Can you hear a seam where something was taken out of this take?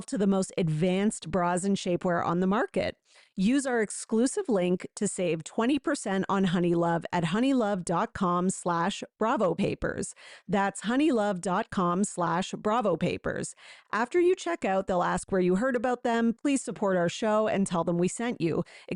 no; 0 cuts

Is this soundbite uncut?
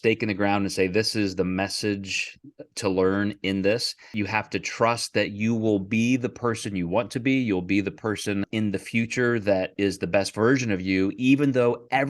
no; 2 cuts; at 4.0 s, 8.5 s

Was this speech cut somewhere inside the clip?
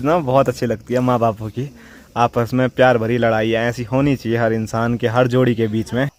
no; 0 cuts

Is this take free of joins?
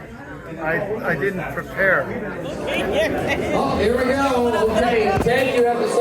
no; 1 cut; at 2.6 s

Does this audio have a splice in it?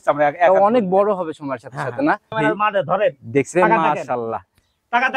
yes; 1 cut; at 2.3 s

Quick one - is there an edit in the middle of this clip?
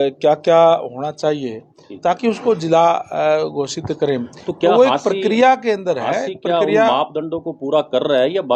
no; 0 cuts

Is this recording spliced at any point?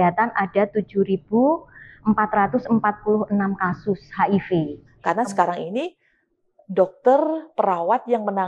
yes; 1 cut; at 4.8 s

